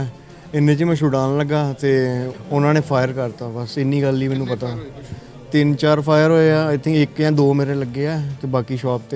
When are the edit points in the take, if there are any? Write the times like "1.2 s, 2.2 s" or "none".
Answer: 2.3 s